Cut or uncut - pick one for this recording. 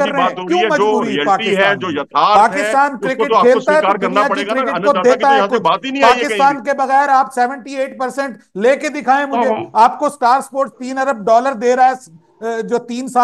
uncut